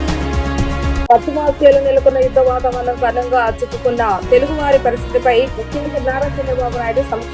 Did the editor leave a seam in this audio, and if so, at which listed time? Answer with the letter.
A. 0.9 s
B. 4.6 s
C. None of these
A